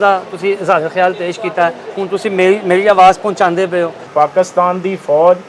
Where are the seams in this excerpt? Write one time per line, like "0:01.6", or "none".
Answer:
0:04.1

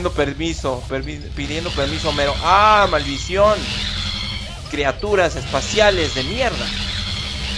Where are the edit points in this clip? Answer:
0:03.1

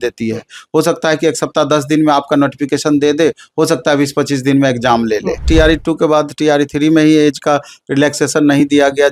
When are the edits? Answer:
0:05.4

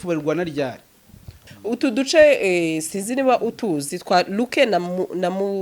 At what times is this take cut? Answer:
0:01.4

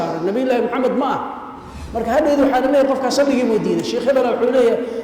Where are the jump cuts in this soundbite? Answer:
0:01.8

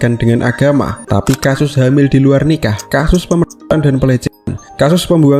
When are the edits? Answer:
0:01.0

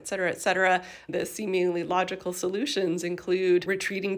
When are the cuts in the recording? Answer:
0:01.1

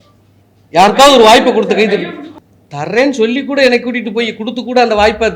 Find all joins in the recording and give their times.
0:02.4

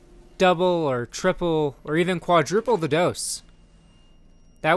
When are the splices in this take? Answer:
none

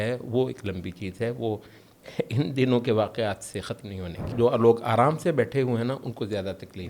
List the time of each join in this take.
0:04.3

